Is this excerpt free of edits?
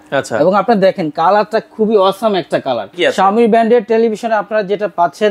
no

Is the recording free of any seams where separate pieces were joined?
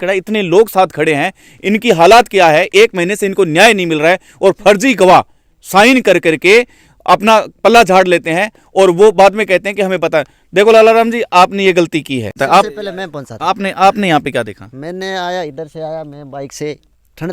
no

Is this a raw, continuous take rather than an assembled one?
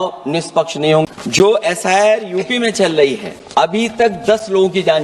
no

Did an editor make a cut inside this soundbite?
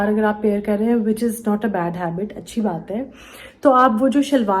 no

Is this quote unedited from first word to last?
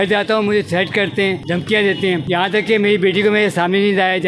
no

